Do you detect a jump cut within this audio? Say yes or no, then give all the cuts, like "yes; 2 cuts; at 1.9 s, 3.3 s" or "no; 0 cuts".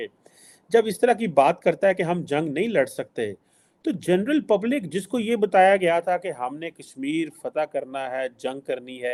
no; 0 cuts